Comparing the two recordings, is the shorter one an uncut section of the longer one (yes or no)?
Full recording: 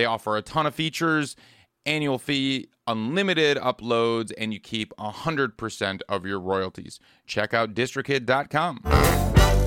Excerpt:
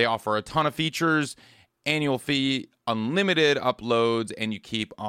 yes